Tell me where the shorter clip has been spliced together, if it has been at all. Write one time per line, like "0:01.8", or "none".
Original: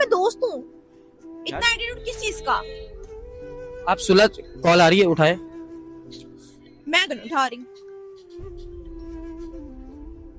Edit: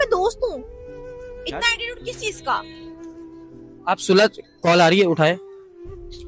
0:05.4